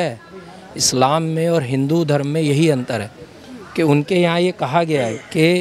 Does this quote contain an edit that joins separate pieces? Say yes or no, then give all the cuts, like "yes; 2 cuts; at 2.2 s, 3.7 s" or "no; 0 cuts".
no; 0 cuts